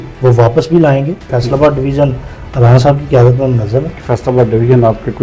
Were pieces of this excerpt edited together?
yes; 2 cuts; at 1.3 s, 4.0 s

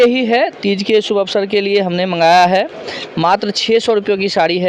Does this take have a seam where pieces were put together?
no; 0 cuts

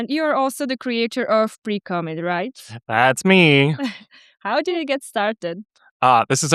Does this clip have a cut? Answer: no; 0 cuts

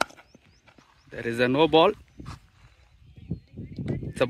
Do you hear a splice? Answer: no; 0 cuts

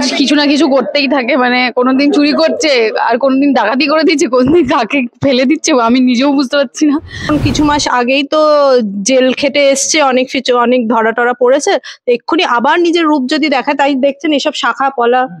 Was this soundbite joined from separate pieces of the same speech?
yes; 1 cut; at 7.3 s

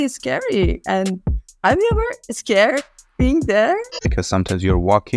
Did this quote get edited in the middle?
yes; 1 cut; at 4.0 s

